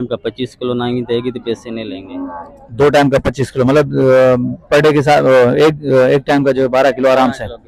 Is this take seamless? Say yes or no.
yes